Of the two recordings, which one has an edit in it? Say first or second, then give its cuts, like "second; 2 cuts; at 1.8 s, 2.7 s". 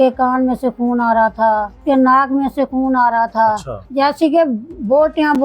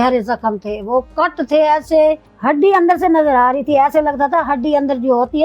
first; 2 cuts; at 1.8 s, 3.8 s